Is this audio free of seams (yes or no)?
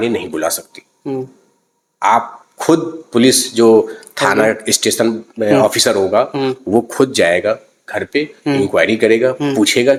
yes